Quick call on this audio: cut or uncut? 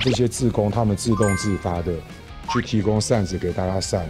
uncut